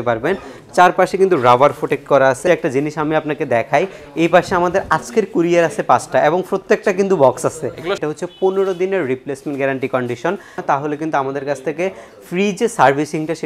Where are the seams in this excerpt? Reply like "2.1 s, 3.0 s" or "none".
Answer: 2.4 s, 8.0 s, 10.6 s